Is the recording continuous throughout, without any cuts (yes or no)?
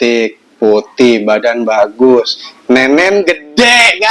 yes